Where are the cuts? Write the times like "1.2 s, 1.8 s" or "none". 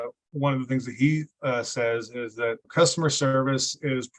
2.7 s